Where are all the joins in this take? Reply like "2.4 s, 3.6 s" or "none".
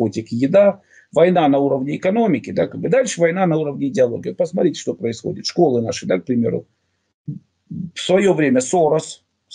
none